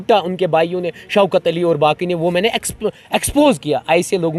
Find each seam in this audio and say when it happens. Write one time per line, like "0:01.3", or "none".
none